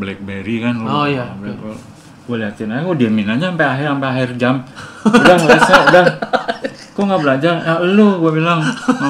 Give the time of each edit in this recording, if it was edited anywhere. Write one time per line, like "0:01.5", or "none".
none

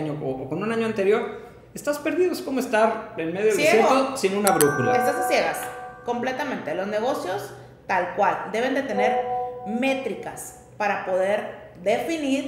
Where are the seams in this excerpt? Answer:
none

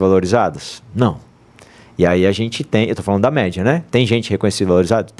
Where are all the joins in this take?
none

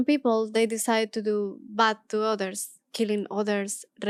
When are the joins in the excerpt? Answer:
none

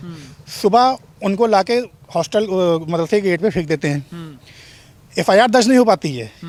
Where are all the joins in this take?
none

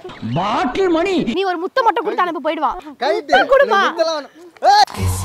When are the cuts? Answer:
0:01.3
0:02.9

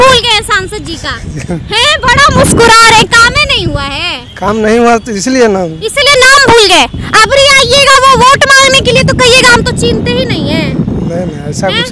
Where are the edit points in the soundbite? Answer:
none

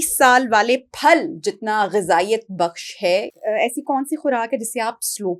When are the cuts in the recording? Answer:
0:03.3

